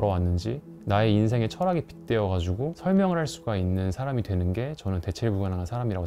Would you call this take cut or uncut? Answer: uncut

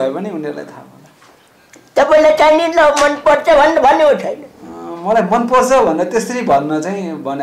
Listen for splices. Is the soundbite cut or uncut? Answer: uncut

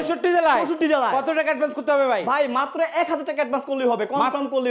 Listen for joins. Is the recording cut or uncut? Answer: uncut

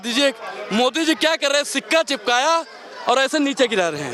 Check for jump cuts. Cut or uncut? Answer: uncut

